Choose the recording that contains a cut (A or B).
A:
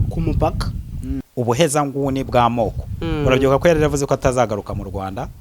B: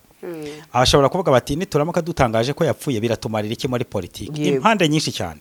A